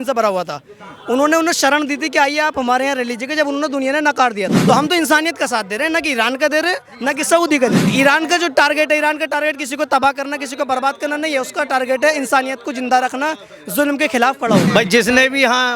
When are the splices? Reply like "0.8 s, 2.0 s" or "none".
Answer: 4.6 s, 7.8 s, 14.7 s